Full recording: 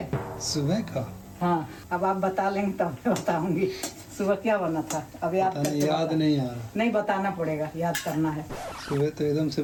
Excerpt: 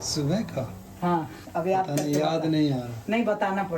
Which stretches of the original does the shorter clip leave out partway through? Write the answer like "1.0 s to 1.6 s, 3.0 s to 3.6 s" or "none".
1.8 s to 5.1 s